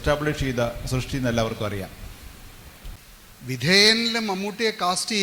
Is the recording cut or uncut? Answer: cut